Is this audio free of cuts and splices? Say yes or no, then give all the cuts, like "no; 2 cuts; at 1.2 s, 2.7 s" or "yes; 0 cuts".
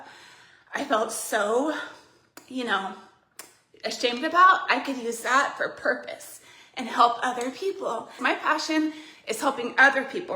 no; 1 cut; at 8.2 s